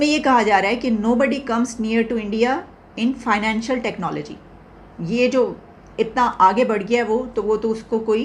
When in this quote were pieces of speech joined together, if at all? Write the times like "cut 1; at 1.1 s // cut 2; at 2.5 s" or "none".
none